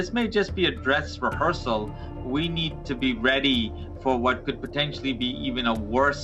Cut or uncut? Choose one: uncut